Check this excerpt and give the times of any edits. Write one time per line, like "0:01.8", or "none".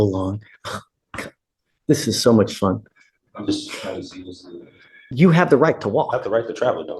0:05.0